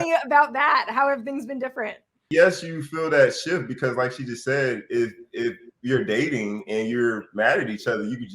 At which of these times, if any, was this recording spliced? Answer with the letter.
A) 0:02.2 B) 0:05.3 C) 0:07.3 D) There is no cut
A